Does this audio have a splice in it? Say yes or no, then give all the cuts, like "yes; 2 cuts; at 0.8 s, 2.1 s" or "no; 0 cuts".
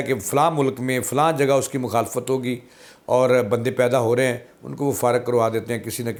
no; 0 cuts